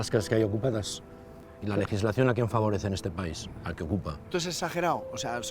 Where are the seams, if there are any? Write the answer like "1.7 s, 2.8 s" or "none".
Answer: 4.3 s